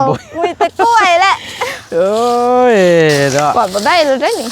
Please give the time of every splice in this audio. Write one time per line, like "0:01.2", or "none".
0:03.5